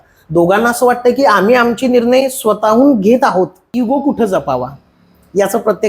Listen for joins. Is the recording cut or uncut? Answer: cut